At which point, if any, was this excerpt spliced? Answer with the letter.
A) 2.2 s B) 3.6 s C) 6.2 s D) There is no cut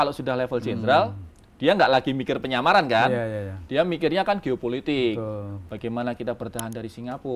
D